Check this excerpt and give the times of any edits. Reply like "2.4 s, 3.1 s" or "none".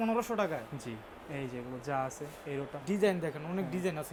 none